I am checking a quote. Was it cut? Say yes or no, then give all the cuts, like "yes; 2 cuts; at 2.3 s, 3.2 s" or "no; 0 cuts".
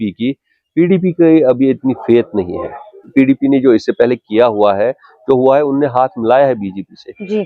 yes; 1 cut; at 3.1 s